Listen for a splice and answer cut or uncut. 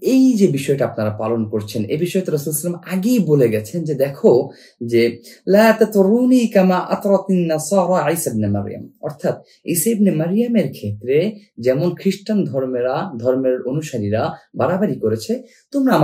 uncut